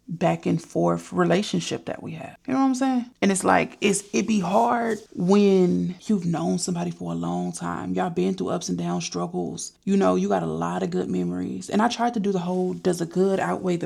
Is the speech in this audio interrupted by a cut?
no; 0 cuts

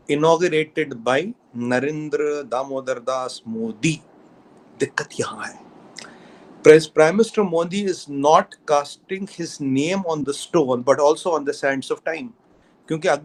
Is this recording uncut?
yes; 0 cuts

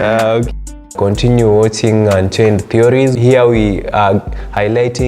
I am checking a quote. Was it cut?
yes; 2 cuts; at 0.8 s, 3.1 s

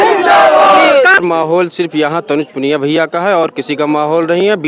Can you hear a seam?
yes; 1 cut; at 1.2 s

